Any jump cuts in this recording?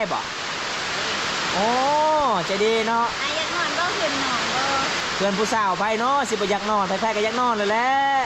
yes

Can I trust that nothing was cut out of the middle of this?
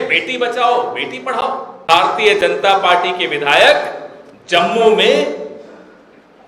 no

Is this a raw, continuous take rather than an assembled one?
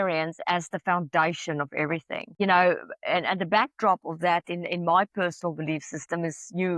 no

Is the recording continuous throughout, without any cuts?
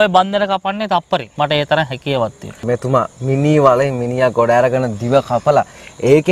no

